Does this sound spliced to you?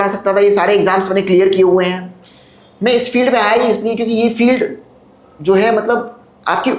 no; 0 cuts

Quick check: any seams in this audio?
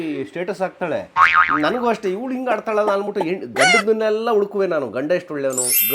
yes; 1 cut; at 1.5 s

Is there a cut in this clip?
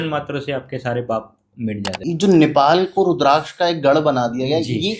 yes; 1 cut; at 1.9 s

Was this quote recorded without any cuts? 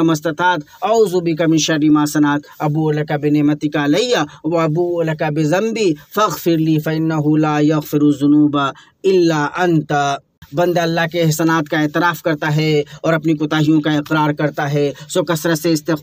no; 1 cut; at 10.4 s

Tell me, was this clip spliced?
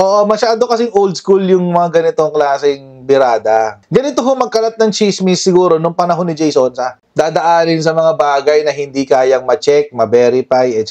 no; 0 cuts

